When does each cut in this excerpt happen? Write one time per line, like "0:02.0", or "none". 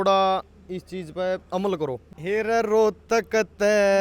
0:02.1